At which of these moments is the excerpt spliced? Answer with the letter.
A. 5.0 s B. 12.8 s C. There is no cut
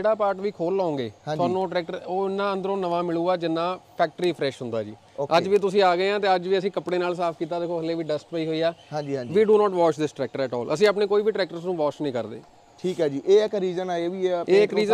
C